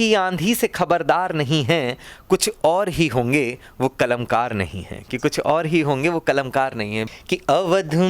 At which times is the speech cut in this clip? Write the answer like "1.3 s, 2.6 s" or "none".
7.0 s